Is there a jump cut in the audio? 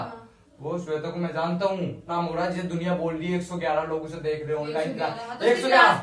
yes; 1 cut; at 2.1 s

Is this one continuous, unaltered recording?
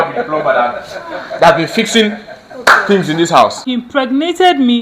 no; 1 cut; at 3.6 s

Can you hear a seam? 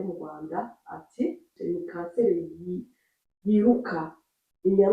yes; 1 cut; at 1.5 s

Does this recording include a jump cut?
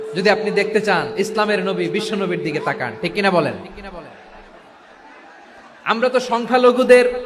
no; 0 cuts

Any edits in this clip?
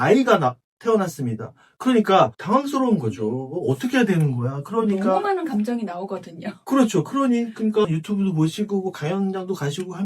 no; 0 cuts

